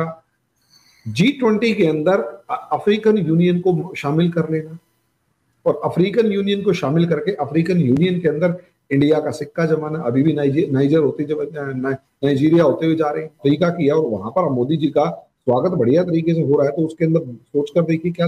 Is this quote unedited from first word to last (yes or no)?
no